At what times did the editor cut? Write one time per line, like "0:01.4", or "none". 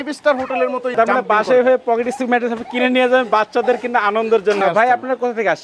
0:00.9
0:04.6